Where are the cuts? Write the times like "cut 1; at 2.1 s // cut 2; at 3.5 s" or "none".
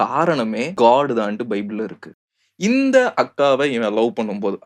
cut 1; at 2.3 s